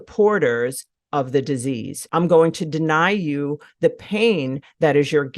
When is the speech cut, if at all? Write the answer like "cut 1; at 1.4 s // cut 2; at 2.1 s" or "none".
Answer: cut 1; at 1.9 s